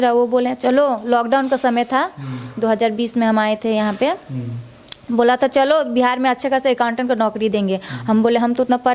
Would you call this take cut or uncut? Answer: uncut